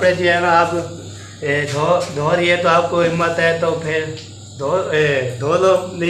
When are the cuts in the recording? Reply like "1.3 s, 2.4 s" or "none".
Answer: none